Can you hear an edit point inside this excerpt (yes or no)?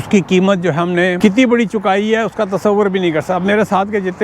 yes